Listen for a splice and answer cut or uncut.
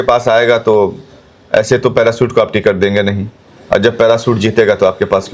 uncut